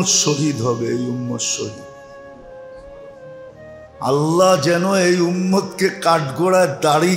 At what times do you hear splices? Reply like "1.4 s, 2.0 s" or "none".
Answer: none